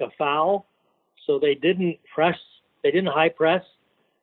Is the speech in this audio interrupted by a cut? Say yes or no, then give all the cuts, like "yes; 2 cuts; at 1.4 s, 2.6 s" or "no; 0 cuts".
no; 0 cuts